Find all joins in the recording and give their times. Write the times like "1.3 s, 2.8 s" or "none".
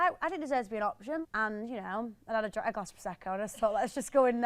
1.2 s

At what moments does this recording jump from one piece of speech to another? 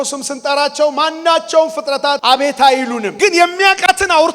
2.2 s, 3.1 s

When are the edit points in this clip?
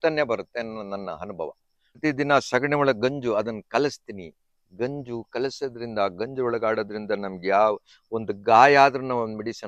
2.0 s

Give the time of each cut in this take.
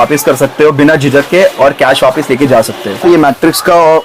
3.0 s

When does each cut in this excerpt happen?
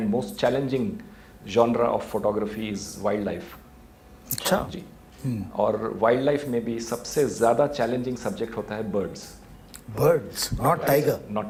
none

